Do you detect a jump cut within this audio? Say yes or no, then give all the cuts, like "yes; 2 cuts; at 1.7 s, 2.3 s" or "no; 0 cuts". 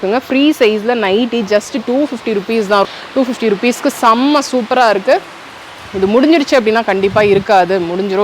yes; 1 cut; at 2.8 s